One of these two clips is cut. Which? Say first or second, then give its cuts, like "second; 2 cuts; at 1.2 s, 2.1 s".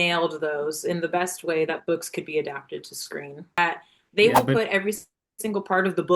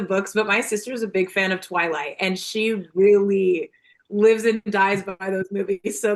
first; 1 cut; at 3.6 s